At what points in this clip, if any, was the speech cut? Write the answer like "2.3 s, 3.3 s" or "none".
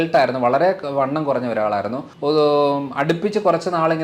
2.1 s